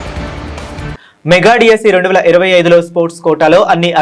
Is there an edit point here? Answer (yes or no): yes